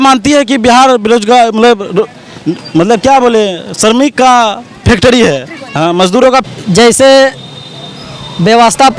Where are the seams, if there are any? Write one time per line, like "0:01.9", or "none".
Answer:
0:06.4

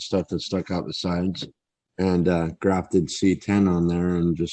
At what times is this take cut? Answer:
0:01.8

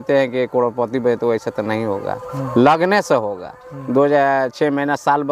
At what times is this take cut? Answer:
none

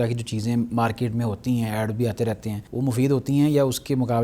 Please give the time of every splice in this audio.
0:02.6

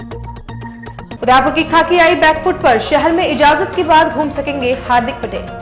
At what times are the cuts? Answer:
0:01.1

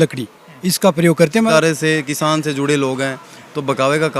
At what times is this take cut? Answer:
0:01.5

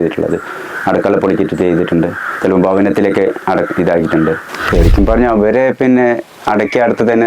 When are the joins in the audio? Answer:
0:04.5

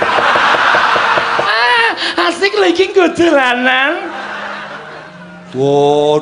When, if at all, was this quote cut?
0:01.5

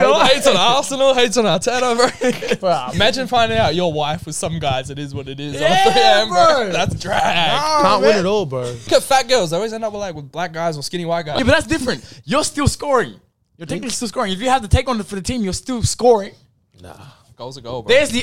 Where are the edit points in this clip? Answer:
0:02.9
0:08.9
0:11.3

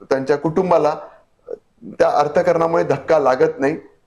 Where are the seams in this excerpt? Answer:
none

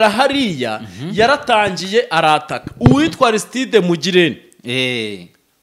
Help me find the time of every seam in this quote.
none

